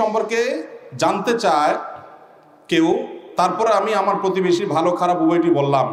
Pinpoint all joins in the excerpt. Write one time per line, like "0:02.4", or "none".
none